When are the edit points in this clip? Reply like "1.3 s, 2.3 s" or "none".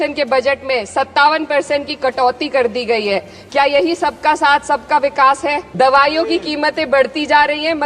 5.7 s

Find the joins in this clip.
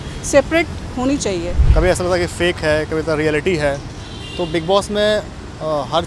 1.6 s

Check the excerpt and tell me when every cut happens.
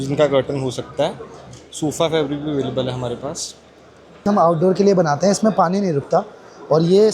4.2 s

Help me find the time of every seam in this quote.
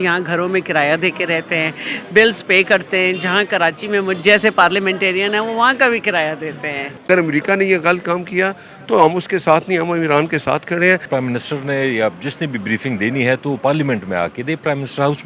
7.1 s, 11.1 s

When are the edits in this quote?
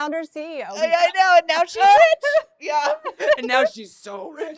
none

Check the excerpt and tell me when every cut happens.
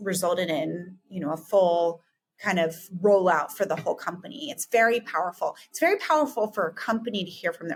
none

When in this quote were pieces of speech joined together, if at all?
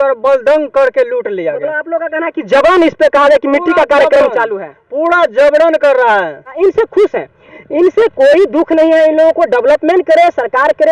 6.5 s

